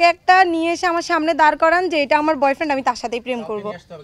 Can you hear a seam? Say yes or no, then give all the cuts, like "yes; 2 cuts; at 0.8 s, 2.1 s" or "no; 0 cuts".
no; 0 cuts